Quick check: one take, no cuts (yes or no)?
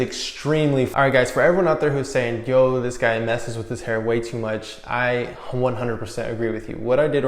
no